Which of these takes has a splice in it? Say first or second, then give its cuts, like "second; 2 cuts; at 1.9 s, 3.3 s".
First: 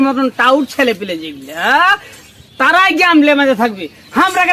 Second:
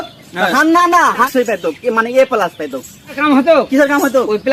second; 1 cut; at 1.3 s